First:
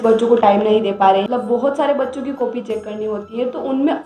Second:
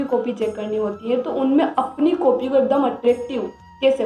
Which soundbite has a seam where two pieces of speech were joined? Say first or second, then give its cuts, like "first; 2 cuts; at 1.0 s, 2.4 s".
first; 1 cut; at 1.3 s